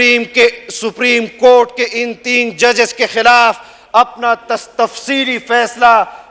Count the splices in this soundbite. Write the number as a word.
zero